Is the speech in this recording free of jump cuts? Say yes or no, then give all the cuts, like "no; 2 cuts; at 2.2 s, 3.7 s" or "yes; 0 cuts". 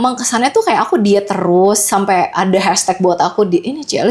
yes; 0 cuts